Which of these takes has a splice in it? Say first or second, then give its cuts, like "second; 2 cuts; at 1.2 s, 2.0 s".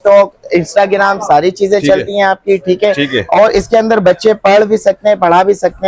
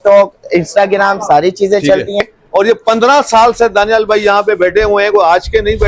second; 1 cut; at 2.2 s